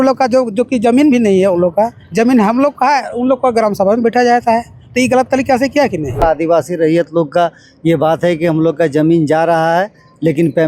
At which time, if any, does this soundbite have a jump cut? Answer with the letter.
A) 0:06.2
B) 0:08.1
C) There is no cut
A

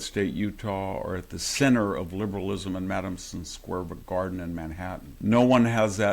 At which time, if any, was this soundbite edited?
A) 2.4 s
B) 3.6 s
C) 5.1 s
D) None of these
C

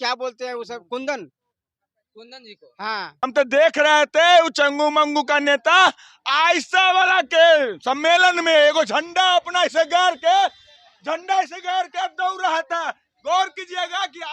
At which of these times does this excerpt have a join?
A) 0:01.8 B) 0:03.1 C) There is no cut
B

